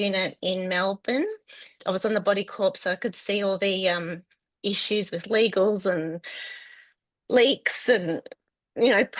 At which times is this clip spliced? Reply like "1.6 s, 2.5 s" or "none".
1.8 s